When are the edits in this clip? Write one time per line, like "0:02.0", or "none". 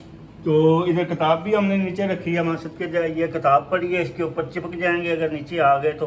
none